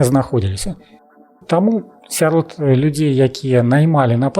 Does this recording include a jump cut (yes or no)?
yes